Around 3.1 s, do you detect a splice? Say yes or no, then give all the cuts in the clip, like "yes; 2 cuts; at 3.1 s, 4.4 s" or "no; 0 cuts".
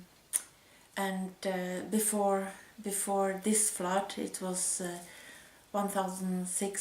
yes; 1 cut; at 3.1 s